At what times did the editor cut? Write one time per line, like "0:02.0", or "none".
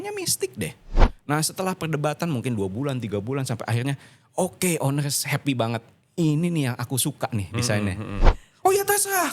0:01.1
0:08.1